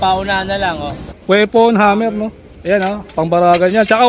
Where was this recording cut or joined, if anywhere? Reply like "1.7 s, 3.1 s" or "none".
1.1 s